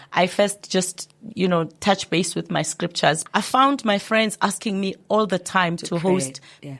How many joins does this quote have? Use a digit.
1